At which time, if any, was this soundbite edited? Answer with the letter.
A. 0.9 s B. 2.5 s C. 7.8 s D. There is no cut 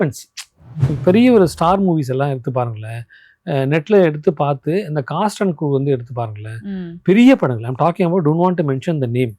A